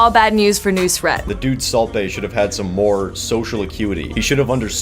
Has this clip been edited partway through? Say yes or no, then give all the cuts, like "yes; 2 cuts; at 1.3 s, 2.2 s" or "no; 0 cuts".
yes; 1 cut; at 1.2 s